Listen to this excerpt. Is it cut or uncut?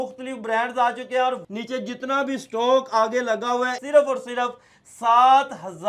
cut